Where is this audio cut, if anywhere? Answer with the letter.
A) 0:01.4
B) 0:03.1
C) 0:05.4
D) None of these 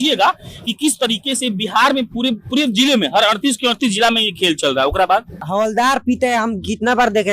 C